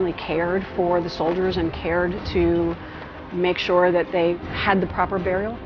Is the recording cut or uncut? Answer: cut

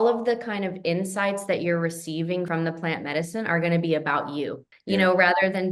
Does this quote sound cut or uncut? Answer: cut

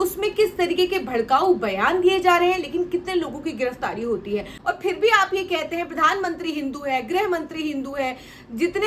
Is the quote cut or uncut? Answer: cut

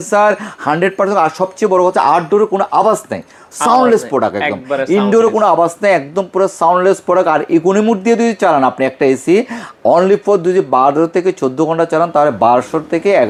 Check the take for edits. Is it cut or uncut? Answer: uncut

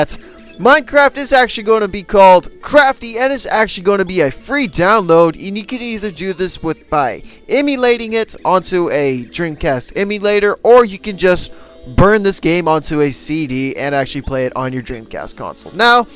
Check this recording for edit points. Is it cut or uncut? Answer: cut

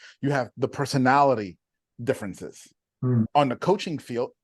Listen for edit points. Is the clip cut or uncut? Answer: cut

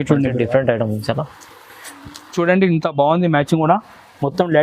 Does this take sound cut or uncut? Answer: cut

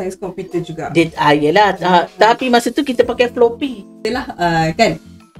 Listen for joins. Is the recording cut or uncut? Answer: cut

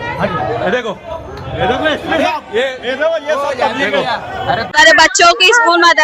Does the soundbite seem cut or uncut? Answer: cut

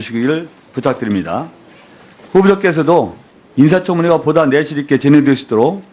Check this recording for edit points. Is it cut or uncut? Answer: uncut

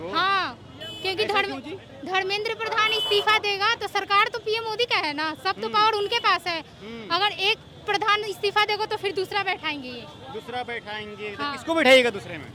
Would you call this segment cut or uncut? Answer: uncut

